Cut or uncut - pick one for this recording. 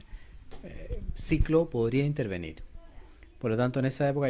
cut